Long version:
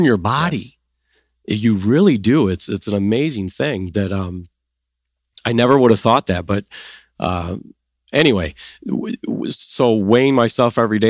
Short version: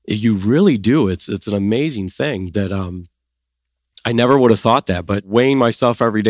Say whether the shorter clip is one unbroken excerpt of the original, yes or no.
no